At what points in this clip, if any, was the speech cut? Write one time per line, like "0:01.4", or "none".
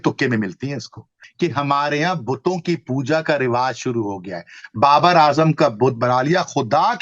0:01.2